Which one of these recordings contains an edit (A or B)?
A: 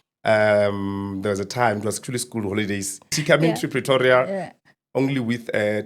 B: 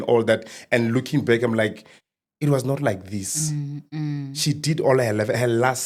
A